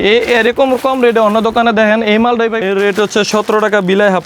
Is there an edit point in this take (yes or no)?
yes